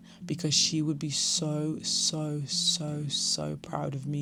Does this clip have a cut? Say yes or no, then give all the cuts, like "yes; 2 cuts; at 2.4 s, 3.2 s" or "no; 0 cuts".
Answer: no; 0 cuts